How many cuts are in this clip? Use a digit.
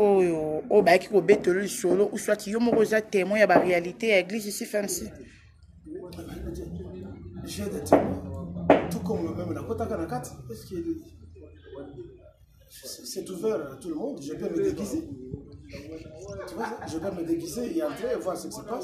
0